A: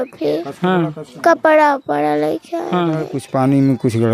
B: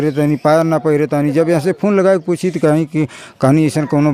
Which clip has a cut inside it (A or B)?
A